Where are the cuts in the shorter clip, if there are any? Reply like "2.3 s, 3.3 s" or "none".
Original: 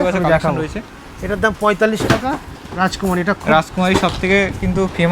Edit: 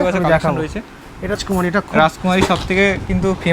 1.4 s